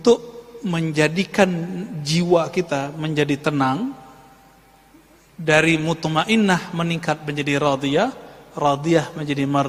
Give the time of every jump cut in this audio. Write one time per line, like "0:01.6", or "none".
none